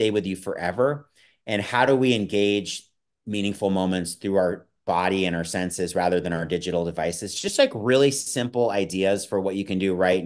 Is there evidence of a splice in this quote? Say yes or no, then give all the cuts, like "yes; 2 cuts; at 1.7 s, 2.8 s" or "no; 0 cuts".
no; 0 cuts